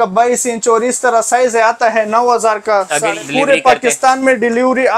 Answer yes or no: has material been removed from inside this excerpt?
yes